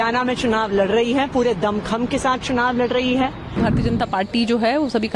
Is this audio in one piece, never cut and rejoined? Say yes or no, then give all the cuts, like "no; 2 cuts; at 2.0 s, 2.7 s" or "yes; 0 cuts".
no; 1 cut; at 3.6 s